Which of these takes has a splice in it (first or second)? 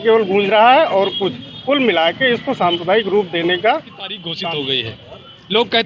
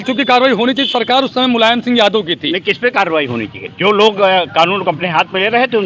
first